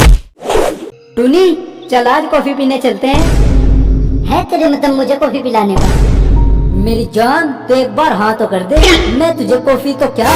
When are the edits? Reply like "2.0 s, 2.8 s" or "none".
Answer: 0.9 s